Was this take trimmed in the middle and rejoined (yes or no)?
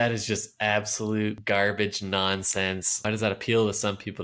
yes